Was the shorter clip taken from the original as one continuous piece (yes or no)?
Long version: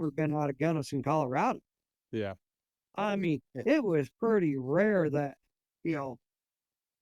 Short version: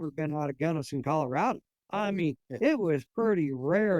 no